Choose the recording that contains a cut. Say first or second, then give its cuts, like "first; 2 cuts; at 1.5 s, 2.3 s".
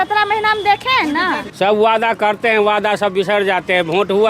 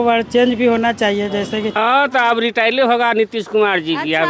second; 1 cut; at 1.8 s